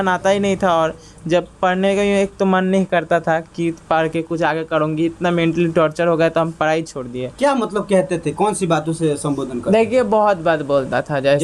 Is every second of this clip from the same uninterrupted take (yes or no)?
yes